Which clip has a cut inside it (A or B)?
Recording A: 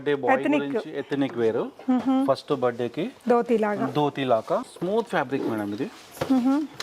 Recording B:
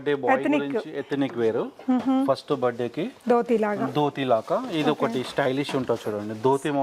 A